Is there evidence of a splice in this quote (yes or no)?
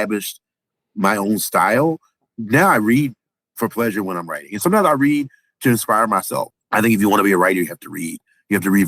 yes